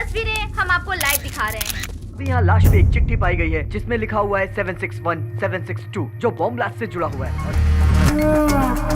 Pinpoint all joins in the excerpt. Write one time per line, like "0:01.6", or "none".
0:02.2
0:07.3